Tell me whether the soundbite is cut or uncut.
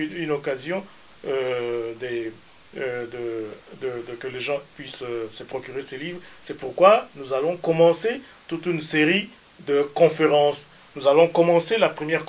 uncut